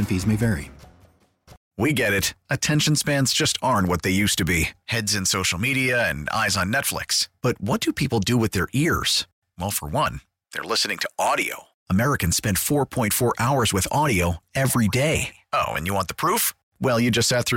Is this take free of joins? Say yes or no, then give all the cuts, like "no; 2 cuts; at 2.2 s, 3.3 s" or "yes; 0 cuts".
no; 1 cut; at 1.6 s